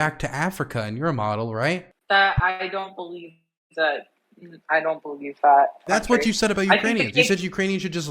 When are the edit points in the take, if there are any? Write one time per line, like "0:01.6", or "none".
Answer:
0:01.9
0:05.8